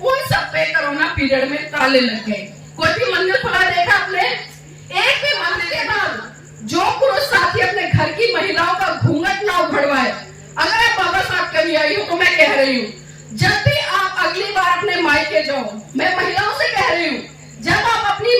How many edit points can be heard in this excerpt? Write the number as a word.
one